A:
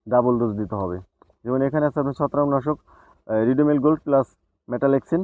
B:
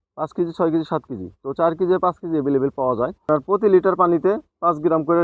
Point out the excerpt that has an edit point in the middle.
B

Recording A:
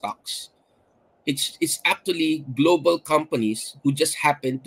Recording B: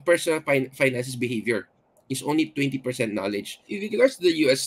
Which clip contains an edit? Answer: B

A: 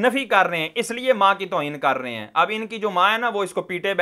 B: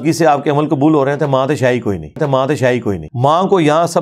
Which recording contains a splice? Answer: B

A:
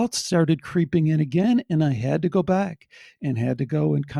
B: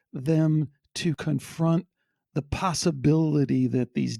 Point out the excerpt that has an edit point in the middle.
B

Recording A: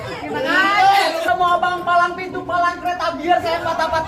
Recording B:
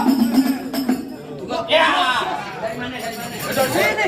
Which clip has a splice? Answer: A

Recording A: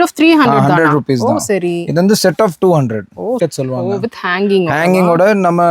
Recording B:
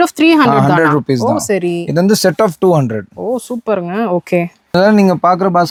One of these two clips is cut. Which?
A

